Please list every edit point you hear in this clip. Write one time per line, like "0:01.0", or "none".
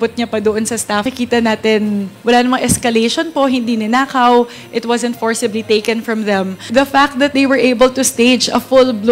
0:01.1
0:06.6